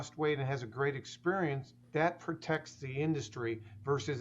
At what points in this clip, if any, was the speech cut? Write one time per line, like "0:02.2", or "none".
0:01.7